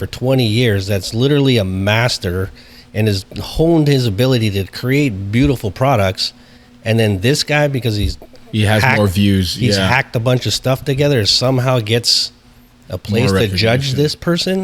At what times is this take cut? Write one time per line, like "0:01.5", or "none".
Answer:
none